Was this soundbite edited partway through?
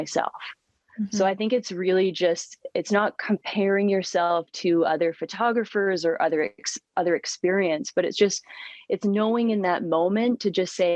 no; 0 cuts

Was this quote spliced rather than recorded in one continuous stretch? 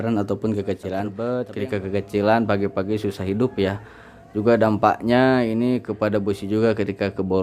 yes; 1 cut; at 1.2 s

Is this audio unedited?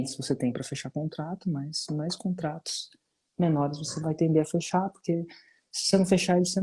yes; 0 cuts

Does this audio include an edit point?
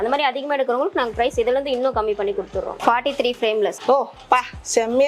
yes; 1 cut; at 2.7 s

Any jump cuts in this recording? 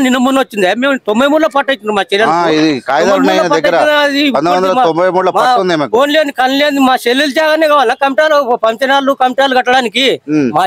no; 0 cuts

